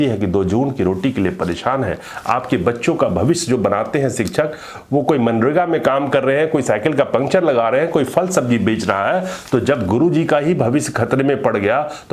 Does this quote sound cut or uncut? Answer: uncut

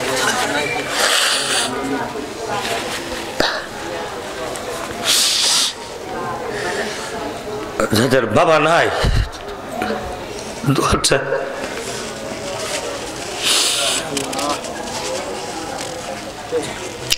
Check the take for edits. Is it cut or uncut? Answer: uncut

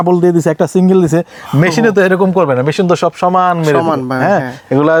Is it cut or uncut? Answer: uncut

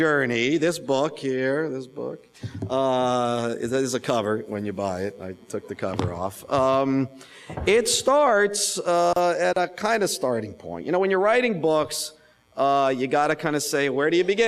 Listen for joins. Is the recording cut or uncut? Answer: cut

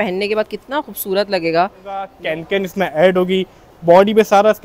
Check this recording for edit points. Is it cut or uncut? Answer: cut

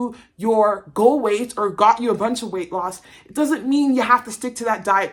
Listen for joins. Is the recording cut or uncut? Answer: uncut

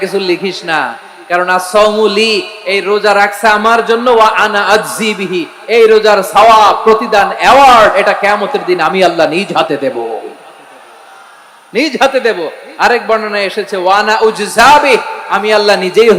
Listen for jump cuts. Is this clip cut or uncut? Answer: uncut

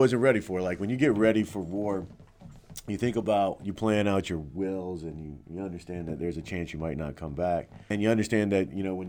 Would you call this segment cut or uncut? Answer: cut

